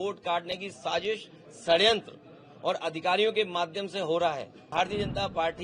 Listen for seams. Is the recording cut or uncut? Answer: cut